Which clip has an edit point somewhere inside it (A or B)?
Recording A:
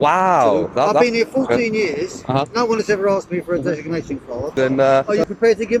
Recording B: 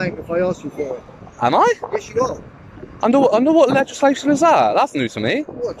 A